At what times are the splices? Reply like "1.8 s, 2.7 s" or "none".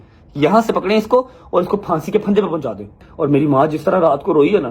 3.1 s